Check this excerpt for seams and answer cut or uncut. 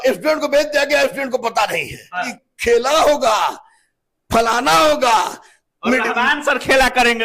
cut